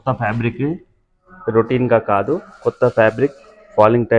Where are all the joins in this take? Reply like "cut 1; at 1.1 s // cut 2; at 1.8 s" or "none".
none